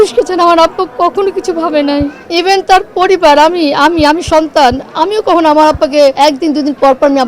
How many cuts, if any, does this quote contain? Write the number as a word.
two